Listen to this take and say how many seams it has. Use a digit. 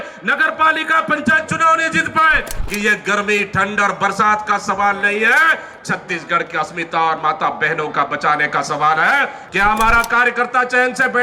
2